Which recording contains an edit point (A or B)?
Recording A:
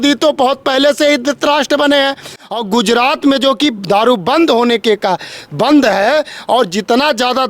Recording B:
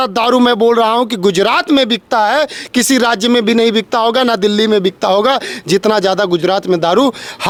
A